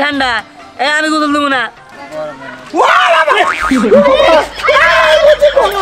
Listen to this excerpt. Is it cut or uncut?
cut